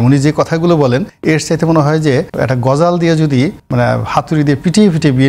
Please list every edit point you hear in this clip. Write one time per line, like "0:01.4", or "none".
0:01.1
0:02.3
0:03.6